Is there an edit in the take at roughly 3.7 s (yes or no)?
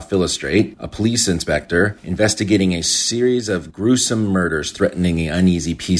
no